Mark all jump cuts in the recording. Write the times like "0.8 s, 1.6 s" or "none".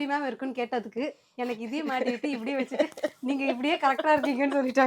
none